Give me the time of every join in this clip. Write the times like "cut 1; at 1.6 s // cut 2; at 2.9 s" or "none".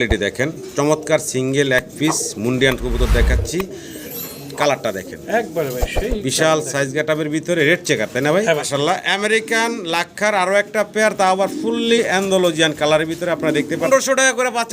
cut 1; at 8.7 s // cut 2; at 13.9 s